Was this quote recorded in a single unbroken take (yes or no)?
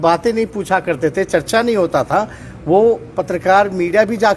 yes